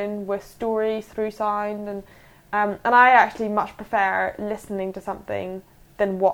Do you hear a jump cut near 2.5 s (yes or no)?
no